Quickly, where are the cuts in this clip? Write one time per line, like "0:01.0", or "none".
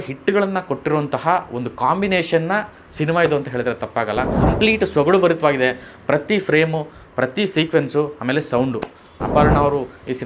0:04.3
0:09.1